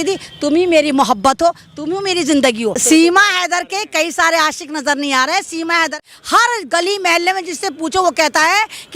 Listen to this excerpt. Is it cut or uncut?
cut